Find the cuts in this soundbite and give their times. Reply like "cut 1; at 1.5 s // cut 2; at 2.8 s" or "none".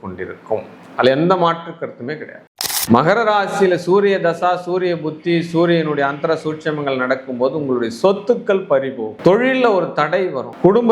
cut 1; at 2.4 s